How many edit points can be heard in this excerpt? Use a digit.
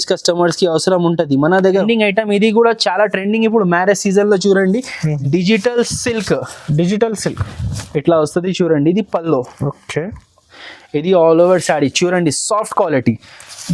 1